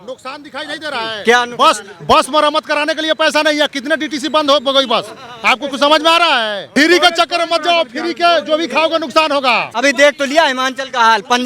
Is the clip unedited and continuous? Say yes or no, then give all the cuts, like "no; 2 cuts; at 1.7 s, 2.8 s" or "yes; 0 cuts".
no; 2 cuts; at 6.6 s, 9.8 s